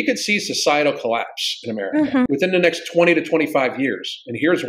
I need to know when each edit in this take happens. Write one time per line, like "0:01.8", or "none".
0:02.3